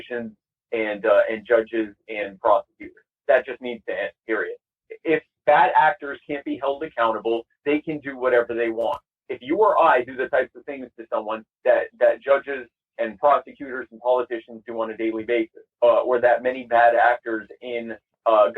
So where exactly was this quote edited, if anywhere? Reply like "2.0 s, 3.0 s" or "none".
5.3 s, 15.6 s